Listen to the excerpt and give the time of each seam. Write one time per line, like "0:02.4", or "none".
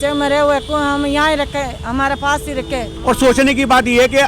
0:02.9